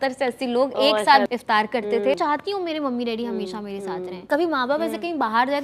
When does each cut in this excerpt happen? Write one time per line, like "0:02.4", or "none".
0:01.3
0:02.2
0:04.2